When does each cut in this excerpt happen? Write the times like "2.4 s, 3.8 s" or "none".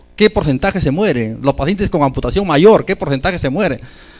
1.2 s